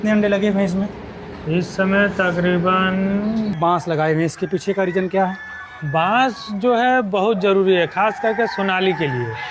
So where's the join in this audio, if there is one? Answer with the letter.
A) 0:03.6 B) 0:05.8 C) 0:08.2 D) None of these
A